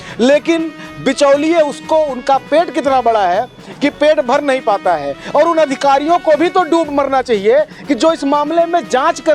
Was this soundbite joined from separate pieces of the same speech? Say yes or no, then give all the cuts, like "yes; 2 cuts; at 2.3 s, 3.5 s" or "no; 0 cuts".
no; 0 cuts